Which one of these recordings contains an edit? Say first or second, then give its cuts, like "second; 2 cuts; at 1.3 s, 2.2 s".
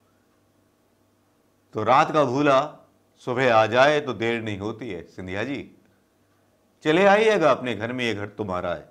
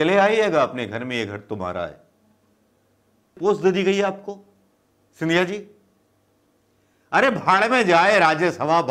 second; 1 cut; at 3.4 s